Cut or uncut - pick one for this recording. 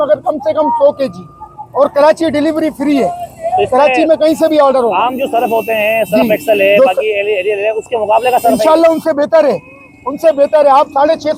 uncut